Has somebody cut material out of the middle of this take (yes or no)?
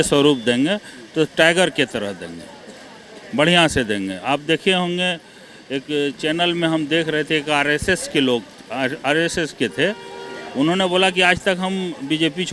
no